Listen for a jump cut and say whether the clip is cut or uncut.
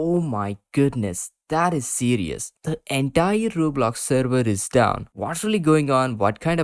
cut